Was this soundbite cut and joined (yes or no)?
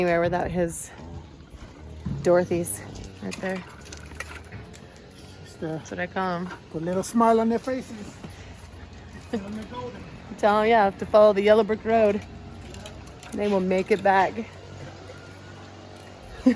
no